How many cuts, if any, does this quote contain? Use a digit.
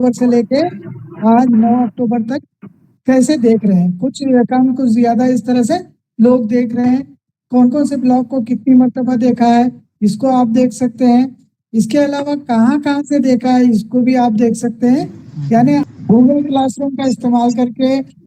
1